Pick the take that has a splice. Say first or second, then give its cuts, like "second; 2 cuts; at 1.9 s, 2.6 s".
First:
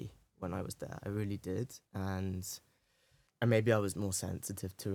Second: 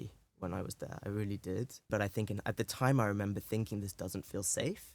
second; 1 cut; at 1.9 s